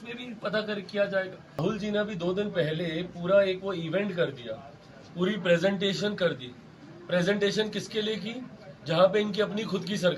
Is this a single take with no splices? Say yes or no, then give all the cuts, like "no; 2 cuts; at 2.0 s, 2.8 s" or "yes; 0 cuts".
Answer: no; 1 cut; at 1.6 s